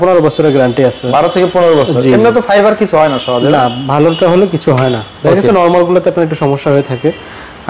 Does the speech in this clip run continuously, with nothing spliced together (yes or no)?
yes